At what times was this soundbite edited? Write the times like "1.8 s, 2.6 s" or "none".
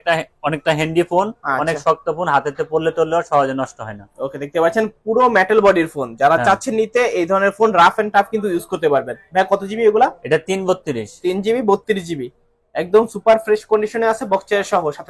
none